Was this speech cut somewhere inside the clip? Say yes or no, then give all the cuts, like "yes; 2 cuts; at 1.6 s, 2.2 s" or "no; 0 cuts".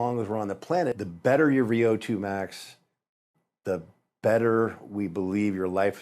yes; 1 cut; at 0.9 s